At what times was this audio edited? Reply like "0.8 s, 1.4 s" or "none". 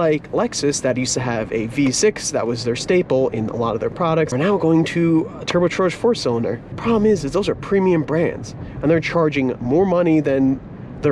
4.3 s, 6.7 s

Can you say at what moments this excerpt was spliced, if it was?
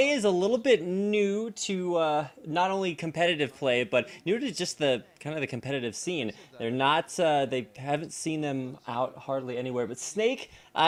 none

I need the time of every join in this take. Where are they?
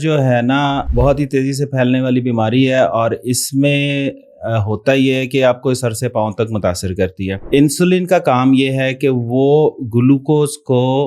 0.9 s, 7.4 s

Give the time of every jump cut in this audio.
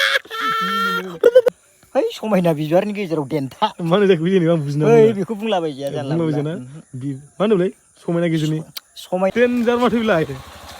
1.5 s, 9.3 s

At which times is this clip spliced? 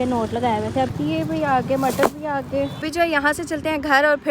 0.9 s, 2.9 s

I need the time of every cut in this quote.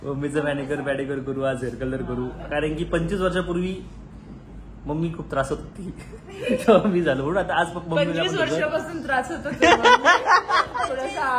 none

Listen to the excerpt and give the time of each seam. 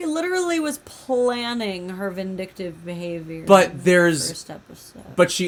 none

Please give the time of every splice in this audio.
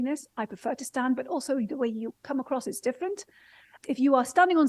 3.7 s

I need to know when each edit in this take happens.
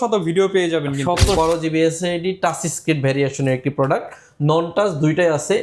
1.4 s

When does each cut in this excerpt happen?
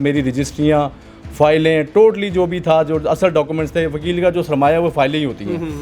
none

